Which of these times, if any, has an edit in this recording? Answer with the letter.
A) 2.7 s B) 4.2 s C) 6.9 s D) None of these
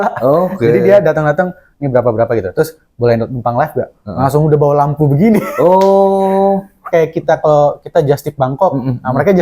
C